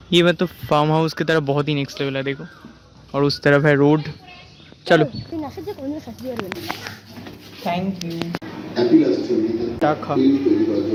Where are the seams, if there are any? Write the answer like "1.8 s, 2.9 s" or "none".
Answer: none